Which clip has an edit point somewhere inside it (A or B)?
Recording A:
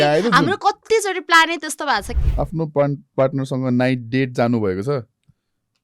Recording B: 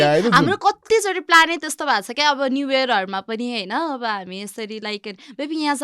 A